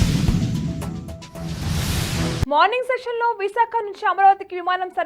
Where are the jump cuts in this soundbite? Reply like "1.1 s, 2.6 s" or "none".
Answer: 2.4 s